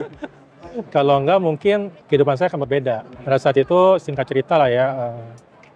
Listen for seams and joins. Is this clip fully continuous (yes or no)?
yes